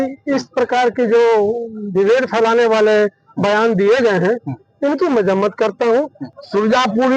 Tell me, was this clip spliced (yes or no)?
yes